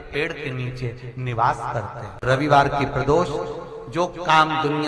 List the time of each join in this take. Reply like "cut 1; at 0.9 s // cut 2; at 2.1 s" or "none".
cut 1; at 2.2 s